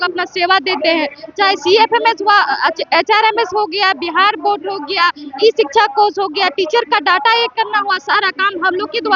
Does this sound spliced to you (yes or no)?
no